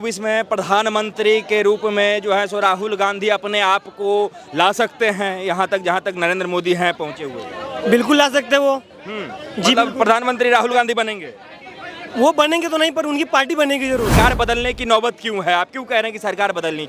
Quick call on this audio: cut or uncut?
cut